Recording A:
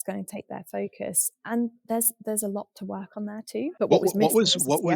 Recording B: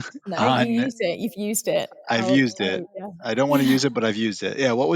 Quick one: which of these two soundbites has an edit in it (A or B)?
A